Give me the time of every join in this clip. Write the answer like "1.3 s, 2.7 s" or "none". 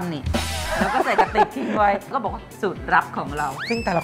2.1 s